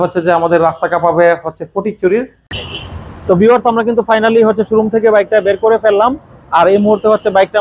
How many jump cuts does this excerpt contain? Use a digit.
1